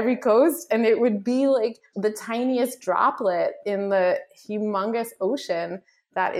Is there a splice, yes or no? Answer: yes